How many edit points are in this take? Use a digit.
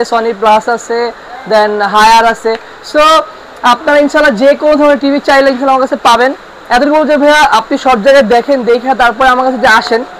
0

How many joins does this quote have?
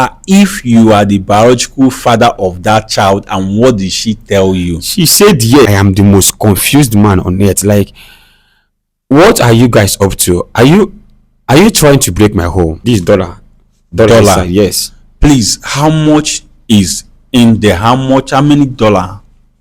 2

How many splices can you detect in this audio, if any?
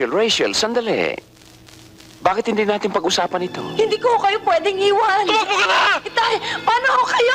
1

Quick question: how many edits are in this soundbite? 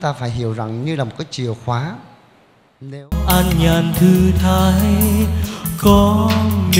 1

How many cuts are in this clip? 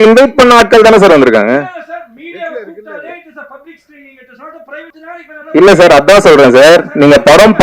1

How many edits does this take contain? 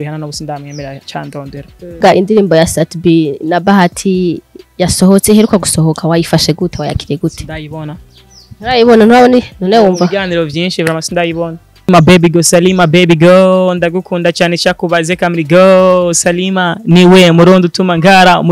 2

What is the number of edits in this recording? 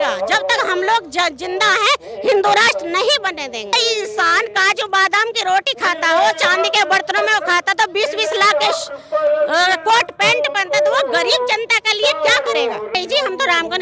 2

